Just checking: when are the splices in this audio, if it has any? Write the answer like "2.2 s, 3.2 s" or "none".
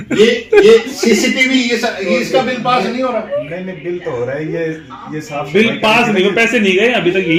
none